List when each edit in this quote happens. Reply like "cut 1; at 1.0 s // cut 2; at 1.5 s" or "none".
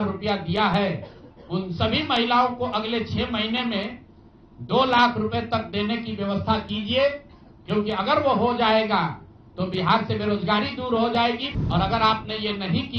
cut 1; at 11.5 s

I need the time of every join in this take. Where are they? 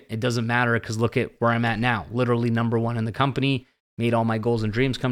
none

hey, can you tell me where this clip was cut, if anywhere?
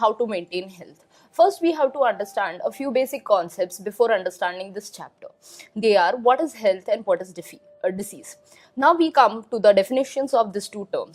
cut 1; at 2.9 s

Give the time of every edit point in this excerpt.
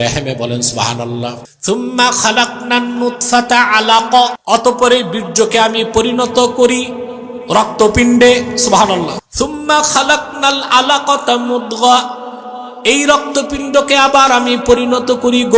cut 1; at 1.5 s // cut 2; at 4.4 s // cut 3; at 9.2 s

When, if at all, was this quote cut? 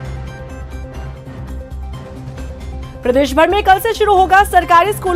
cut 1; at 1.0 s

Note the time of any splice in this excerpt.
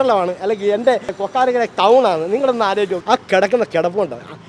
cut 1; at 3.0 s

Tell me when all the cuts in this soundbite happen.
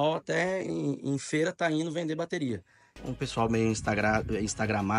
cut 1; at 2.9 s

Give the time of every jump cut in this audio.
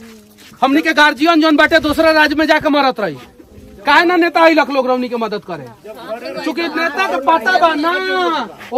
none

